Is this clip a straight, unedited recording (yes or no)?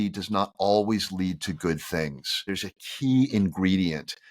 no